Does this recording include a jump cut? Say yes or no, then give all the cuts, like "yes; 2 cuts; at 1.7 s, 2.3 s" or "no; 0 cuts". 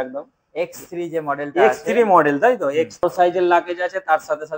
yes; 1 cut; at 3.0 s